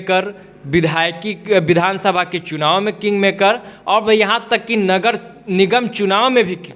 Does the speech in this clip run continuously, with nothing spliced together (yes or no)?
yes